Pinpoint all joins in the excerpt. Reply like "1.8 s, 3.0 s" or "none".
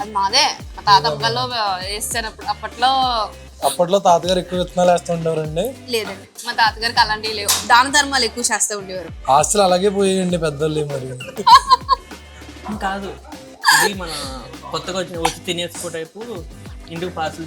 3.4 s, 11.4 s